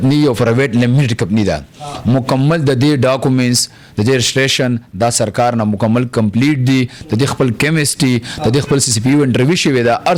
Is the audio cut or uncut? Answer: uncut